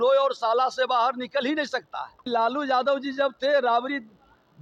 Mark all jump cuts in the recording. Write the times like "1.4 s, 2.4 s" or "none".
2.2 s

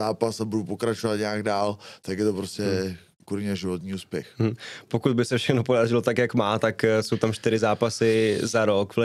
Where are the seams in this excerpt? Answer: none

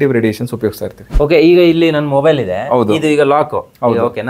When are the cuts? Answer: 1.0 s

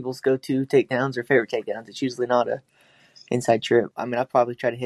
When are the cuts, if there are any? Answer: 3.9 s

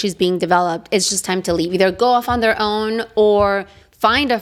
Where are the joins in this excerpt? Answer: none

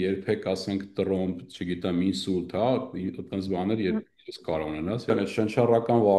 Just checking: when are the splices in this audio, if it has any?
5.1 s

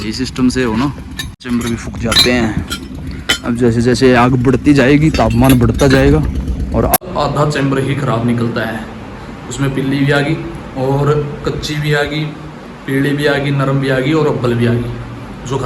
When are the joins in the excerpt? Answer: 1.4 s, 7.0 s

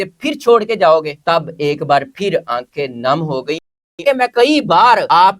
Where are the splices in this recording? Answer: 3.8 s

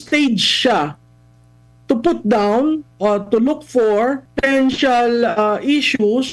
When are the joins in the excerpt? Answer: 4.3 s

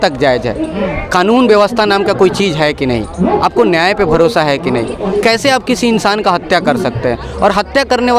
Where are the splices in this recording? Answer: none

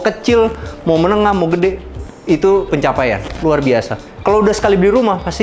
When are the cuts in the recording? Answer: none

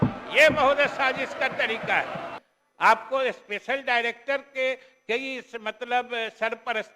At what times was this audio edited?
2.3 s

